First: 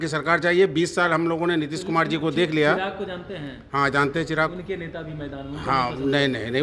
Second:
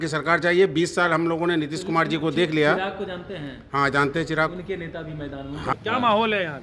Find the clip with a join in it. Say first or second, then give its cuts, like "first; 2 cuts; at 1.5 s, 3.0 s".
second; 1 cut; at 5.7 s